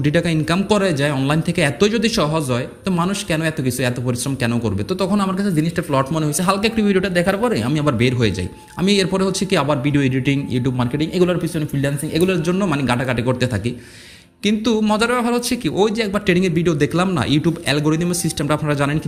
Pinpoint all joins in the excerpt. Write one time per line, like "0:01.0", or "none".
none